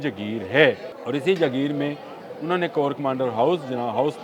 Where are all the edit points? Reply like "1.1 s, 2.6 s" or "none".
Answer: 0.9 s

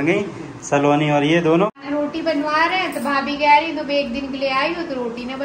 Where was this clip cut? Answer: 1.8 s

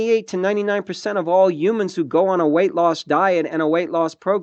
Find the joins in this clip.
none

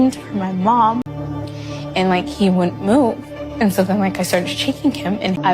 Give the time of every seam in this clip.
1.2 s

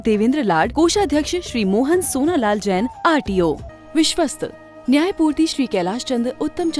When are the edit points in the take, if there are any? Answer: 3.7 s

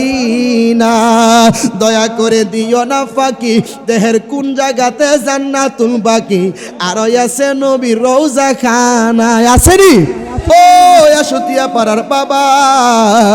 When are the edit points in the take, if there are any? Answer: 10.5 s

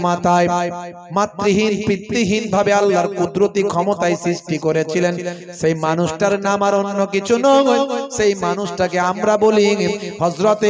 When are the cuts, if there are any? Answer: none

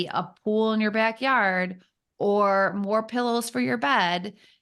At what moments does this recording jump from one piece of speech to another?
none

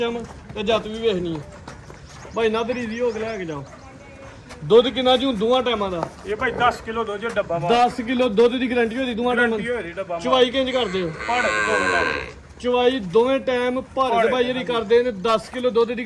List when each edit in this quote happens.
none

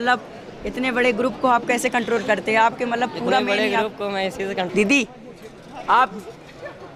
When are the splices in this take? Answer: 4.7 s

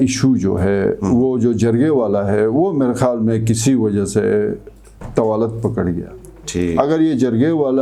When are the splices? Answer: none

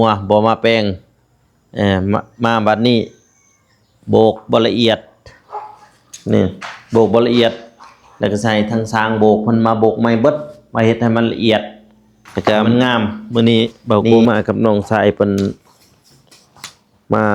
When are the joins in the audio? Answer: 13.2 s

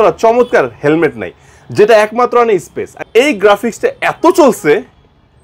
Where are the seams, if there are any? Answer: 3.0 s

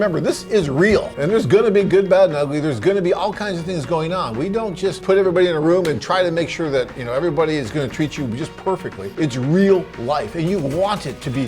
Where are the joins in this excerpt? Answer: 1.1 s, 5.0 s, 9.0 s

